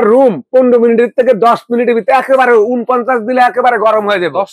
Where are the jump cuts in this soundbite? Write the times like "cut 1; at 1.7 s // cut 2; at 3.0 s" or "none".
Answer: none